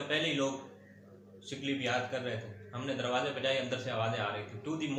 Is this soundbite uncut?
yes; 0 cuts

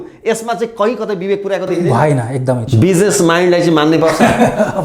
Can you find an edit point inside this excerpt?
yes; 1 cut; at 2.6 s

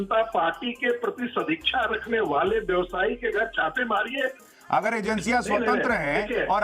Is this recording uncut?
no; 1 cut; at 4.5 s

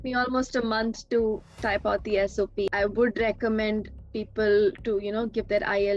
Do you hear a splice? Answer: yes; 1 cut; at 2.7 s

